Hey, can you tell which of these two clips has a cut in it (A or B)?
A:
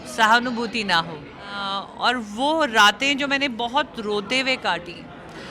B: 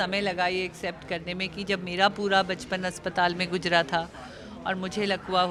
A